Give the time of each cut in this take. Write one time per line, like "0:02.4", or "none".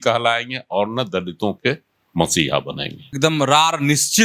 0:03.1